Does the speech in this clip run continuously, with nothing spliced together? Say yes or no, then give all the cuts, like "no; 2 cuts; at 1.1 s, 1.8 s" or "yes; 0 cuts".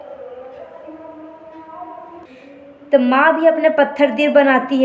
no; 1 cut; at 2.2 s